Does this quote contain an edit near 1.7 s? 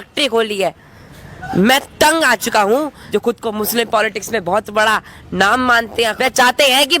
no; 2 cuts; at 3.0 s, 6.1 s

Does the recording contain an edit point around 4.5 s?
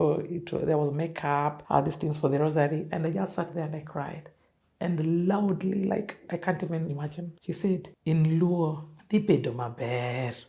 no; 1 cut; at 1.6 s

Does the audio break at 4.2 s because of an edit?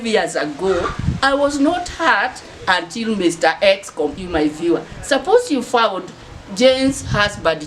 yes; 1 cut; at 4.2 s

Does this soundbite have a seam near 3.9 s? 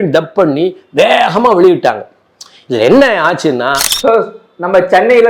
yes; 1 cut; at 3.9 s

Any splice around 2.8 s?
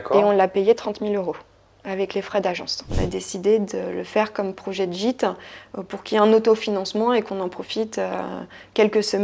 yes; 1 cut; at 2.8 s

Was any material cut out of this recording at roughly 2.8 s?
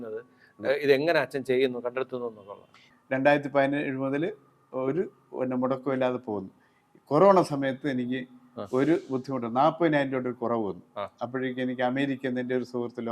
yes; 1 cut; at 2.8 s

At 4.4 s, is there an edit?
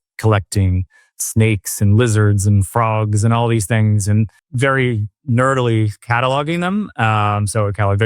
yes; 1 cut; at 4.4 s

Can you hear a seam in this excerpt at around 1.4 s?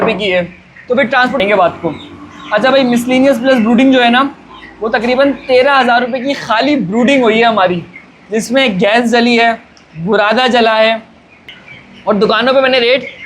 yes; 2 cuts; at 1.4 s, 11.3 s

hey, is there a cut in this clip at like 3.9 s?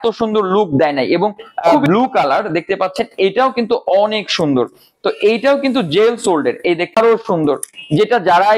no; 2 cuts; at 1.9 s, 7.0 s

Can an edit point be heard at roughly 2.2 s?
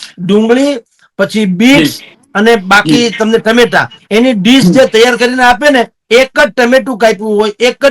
no; 0 cuts

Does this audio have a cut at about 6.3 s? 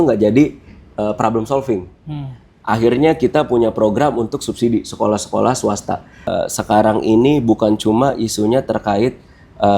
yes; 1 cut; at 6.3 s

